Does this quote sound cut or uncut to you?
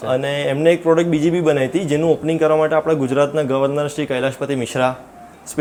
uncut